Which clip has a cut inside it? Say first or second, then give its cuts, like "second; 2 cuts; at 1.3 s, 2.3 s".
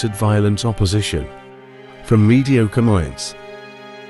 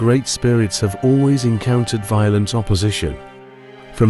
first; 1 cut; at 3.2 s